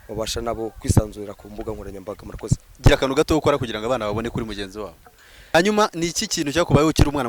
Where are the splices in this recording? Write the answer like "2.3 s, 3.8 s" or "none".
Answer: 2.7 s, 5.5 s